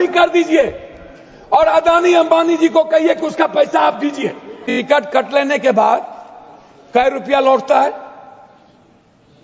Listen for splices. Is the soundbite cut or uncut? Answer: cut